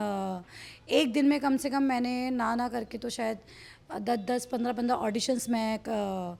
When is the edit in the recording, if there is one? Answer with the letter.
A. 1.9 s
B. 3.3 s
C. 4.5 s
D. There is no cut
D